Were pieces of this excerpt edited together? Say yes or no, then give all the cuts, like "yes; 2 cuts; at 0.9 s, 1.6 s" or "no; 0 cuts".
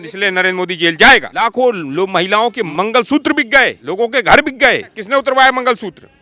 yes; 4 cuts; at 1.3 s, 2.6 s, 3.8 s, 5.0 s